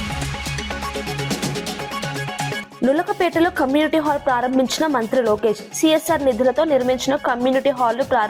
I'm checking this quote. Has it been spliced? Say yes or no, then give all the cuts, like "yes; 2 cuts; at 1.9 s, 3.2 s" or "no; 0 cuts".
yes; 1 cut; at 2.7 s